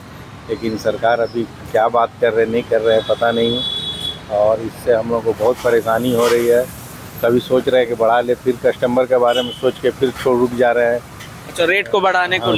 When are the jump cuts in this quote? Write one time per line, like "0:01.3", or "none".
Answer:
none